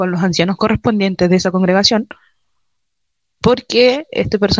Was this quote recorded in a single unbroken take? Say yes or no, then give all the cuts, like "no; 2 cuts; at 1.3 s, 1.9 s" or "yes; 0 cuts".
yes; 0 cuts